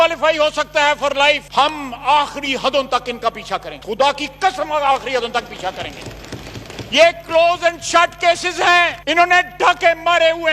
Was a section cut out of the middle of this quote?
no; 0 cuts

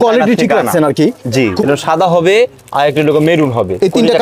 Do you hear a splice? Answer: yes; 1 cut; at 1.7 s

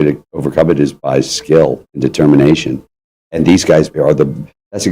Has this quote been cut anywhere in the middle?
yes; 2 cuts; at 1.9 s, 3.9 s

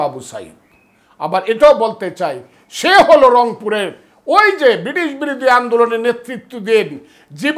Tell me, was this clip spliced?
no; 0 cuts

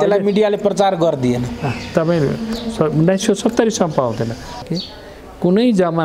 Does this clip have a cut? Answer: yes; 1 cut; at 4.6 s

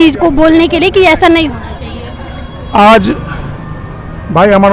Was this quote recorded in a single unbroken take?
yes; 0 cuts

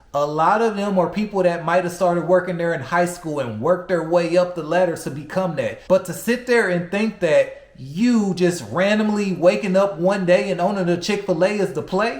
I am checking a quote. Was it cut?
yes; 1 cut; at 5.8 s

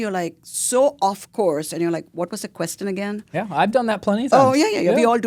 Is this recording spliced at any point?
no; 0 cuts

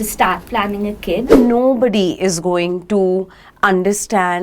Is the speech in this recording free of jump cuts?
no; 1 cut; at 1.3 s

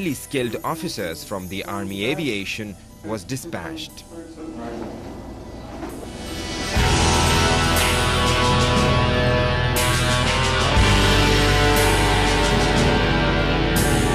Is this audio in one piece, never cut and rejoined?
no; 1 cut; at 8.5 s

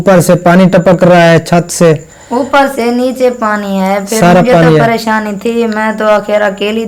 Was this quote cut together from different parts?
no; 0 cuts

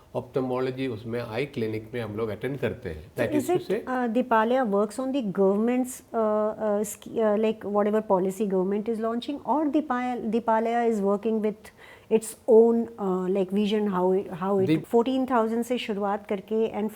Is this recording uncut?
no; 2 cuts; at 3.0 s, 14.8 s

